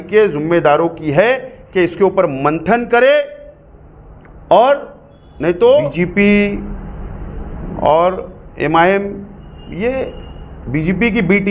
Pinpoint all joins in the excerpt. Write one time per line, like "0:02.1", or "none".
0:05.9